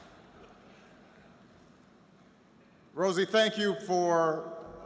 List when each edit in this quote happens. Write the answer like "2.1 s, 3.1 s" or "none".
1.9 s

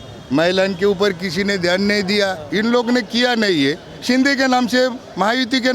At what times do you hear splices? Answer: 2.5 s

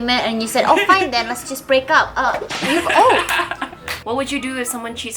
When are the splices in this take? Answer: 3.8 s

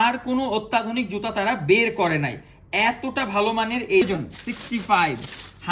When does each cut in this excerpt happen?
4.0 s

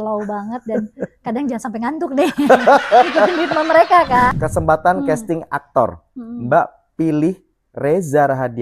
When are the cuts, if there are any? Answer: 4.3 s

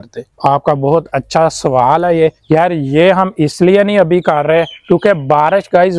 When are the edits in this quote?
none

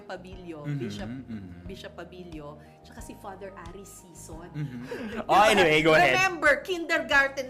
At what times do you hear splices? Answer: 4.8 s

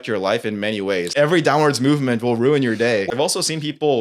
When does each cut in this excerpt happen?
1.1 s, 3.1 s

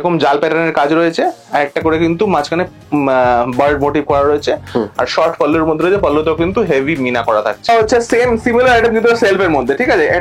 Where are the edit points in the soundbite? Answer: 7.7 s

